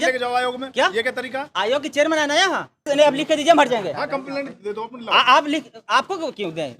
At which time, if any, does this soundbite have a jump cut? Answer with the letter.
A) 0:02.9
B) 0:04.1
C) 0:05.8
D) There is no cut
A